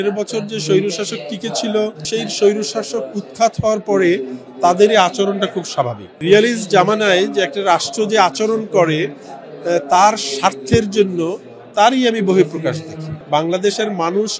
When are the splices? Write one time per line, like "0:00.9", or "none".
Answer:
0:02.0
0:06.2
0:13.1